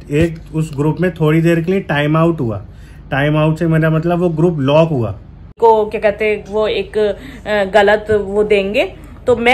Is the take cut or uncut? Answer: cut